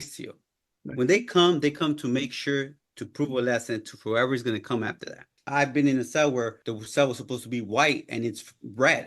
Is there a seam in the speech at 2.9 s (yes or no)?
no